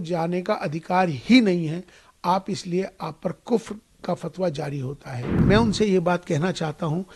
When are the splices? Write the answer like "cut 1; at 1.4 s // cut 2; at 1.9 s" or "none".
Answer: cut 1; at 5.4 s